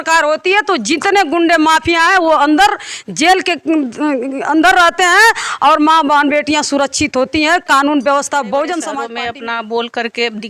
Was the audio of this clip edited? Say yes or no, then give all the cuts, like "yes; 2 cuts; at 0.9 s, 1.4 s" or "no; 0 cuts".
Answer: yes; 1 cut; at 9.1 s